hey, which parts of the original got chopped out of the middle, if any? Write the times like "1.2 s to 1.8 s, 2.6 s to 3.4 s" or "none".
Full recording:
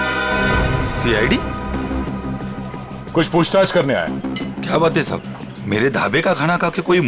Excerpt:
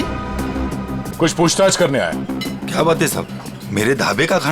2.4 s to 3.0 s

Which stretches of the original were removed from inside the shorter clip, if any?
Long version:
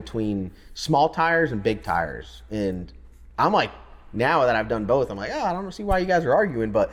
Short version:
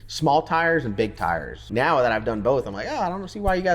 2.2 s to 4.0 s

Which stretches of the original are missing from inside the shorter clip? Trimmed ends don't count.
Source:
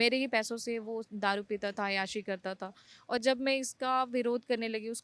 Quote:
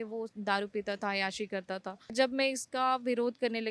2.9 s to 3.2 s

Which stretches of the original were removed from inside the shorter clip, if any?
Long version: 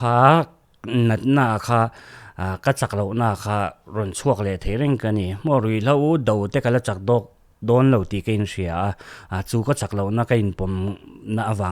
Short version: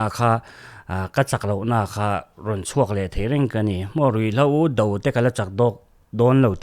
none

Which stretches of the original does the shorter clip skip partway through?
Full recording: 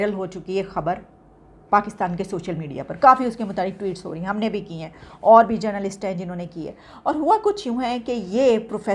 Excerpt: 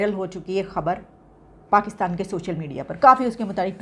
none

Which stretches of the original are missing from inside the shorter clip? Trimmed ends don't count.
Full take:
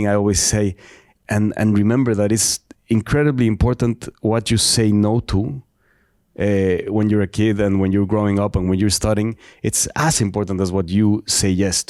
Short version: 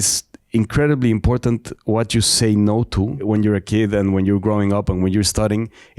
5.6 s to 6.9 s

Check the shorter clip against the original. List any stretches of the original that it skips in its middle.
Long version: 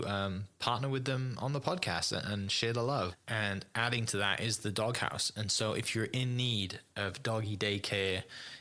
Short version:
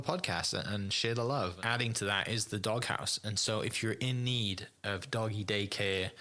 3.2 s to 3.7 s

